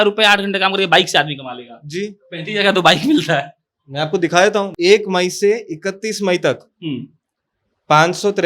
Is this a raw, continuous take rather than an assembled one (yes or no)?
no